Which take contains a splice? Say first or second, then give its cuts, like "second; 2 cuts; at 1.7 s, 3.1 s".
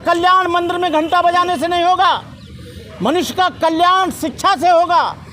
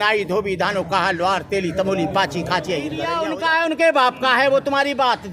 second; 1 cut; at 3.2 s